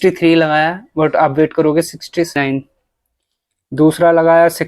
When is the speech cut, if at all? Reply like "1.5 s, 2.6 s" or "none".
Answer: 2.4 s